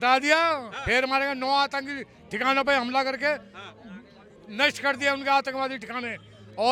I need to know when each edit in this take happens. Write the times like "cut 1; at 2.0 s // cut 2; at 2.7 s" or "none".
none